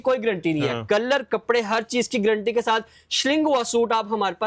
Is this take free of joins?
yes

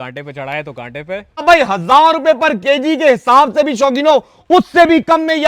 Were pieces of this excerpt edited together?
yes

